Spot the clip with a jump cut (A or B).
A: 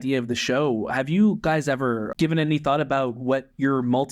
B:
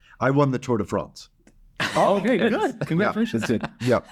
A